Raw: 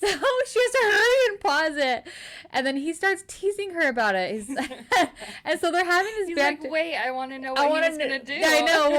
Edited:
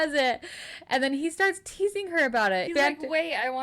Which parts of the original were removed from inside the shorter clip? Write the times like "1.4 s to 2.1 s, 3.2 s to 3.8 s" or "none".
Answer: 4.3 s to 6.3 s